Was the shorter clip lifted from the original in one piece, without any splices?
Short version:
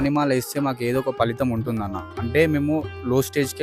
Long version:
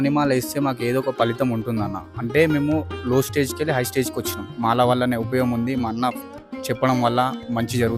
yes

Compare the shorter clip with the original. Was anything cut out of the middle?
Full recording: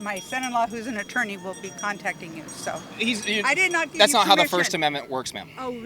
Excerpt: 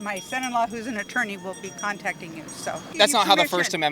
yes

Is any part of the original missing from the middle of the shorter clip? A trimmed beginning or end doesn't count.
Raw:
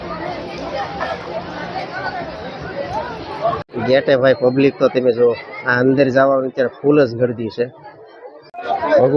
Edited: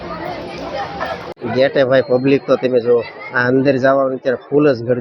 yes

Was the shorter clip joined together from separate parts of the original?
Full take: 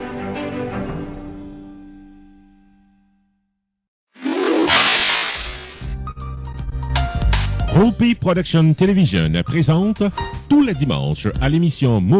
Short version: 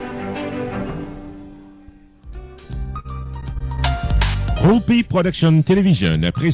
yes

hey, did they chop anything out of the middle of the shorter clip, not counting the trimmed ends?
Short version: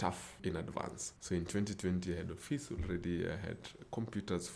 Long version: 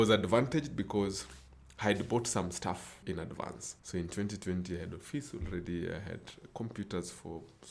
no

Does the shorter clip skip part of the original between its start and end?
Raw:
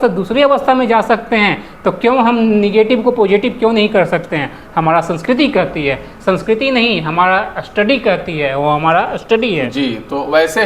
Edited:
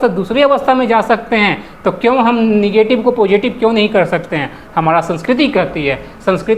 no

